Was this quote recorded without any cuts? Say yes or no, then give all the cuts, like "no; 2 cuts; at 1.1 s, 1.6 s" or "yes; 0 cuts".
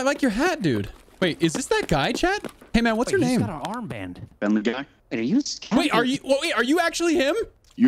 no; 2 cuts; at 1.0 s, 4.2 s